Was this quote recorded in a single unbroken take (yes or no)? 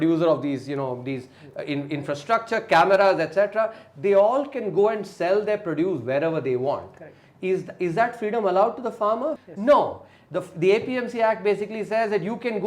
no